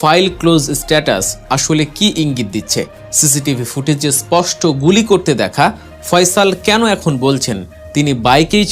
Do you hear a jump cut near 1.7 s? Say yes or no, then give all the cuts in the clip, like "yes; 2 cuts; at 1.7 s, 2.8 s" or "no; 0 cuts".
no; 1 cut; at 3.0 s